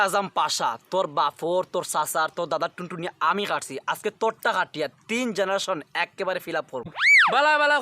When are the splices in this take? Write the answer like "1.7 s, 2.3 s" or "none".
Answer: 6.9 s